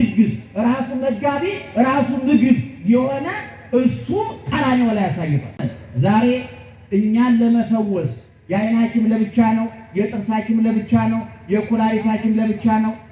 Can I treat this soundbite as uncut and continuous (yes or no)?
no